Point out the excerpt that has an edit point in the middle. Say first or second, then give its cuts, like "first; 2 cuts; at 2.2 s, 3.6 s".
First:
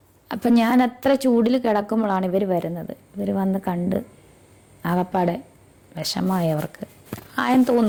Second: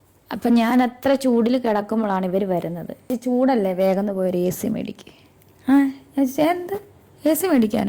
second; 1 cut; at 3.1 s